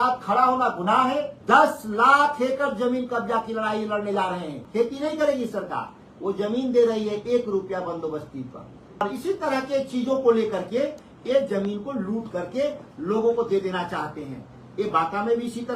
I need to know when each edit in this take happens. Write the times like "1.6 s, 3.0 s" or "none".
1.3 s, 4.6 s, 9.0 s